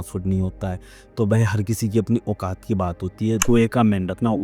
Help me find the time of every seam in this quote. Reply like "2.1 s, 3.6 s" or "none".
3.4 s